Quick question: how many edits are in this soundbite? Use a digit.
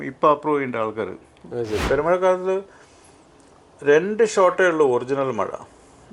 1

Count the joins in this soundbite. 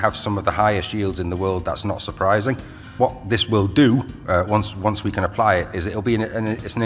1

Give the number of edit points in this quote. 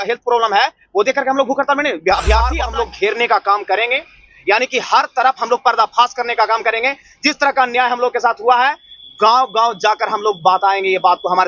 1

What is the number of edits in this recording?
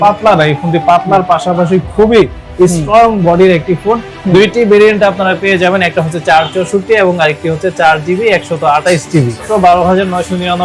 2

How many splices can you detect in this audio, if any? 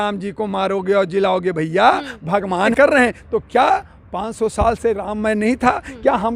1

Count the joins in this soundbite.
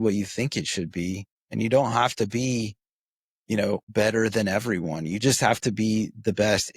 2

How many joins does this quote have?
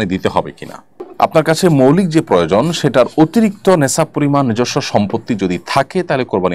0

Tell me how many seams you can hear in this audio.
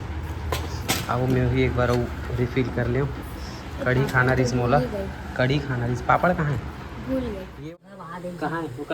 1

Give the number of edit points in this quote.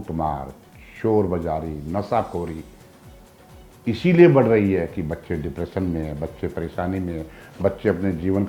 0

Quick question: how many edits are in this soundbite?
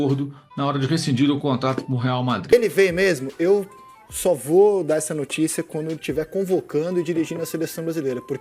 1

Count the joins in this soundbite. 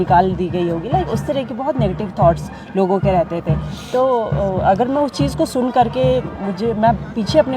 0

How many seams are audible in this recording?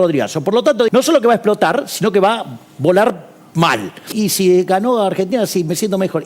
2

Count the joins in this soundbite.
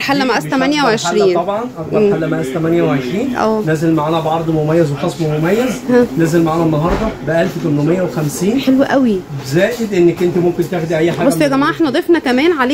0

